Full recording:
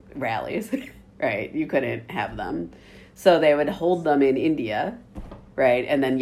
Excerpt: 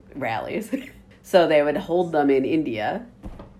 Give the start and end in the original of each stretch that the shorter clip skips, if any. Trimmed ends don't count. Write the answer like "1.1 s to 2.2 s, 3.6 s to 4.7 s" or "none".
1.0 s to 2.9 s